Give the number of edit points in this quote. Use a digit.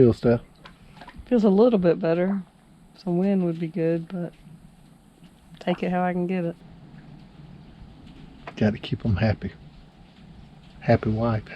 0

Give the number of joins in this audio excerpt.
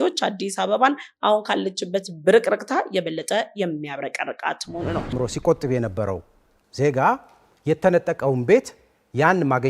1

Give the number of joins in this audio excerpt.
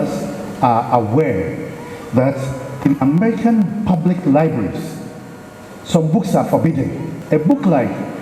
1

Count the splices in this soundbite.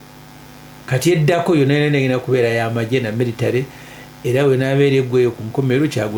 0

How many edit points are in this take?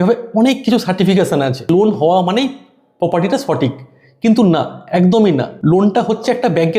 2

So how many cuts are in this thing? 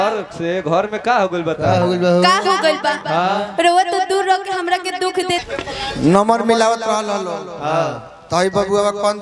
1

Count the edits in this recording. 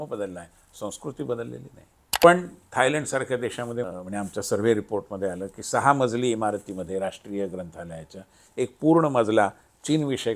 2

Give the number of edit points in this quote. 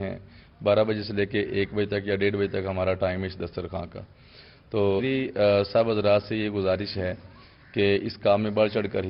1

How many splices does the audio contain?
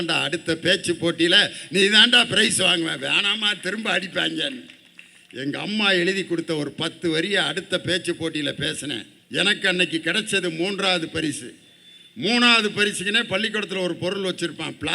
1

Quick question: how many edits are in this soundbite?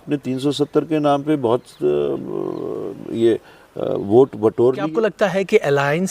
1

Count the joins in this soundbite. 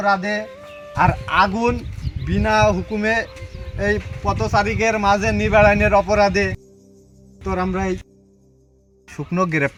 0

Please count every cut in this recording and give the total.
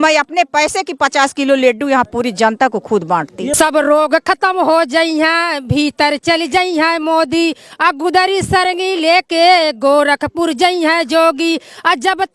1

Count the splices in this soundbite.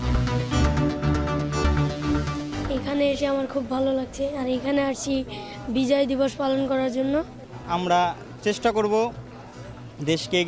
1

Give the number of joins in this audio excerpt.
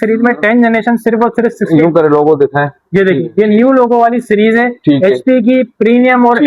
0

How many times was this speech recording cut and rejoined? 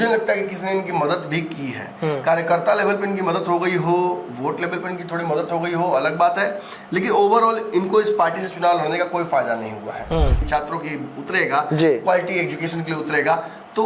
1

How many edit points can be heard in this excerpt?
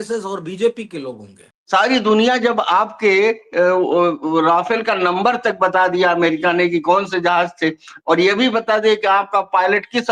1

